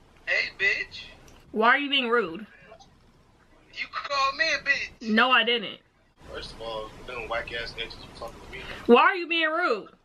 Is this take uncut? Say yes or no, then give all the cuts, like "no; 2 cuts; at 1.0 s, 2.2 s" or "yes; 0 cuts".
no; 2 cuts; at 6.1 s, 8.9 s